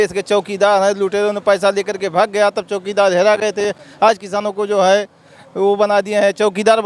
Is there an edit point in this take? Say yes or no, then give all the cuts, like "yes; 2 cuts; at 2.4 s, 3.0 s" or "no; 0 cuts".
no; 0 cuts